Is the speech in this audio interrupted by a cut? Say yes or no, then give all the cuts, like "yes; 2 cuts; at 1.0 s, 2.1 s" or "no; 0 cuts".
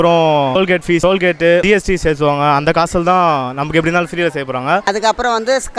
yes; 1 cut; at 4.8 s